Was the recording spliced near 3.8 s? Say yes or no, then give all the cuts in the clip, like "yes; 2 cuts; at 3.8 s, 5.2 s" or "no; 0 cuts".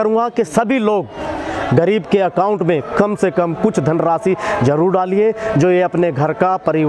no; 0 cuts